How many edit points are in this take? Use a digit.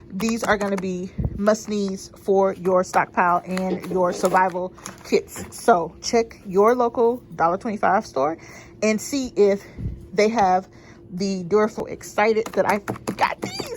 1